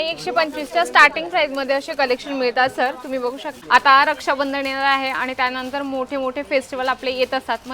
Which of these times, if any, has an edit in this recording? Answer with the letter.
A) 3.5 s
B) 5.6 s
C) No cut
A